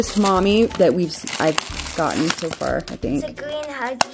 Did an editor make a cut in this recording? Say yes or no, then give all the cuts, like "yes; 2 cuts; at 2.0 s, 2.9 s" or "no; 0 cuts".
no; 0 cuts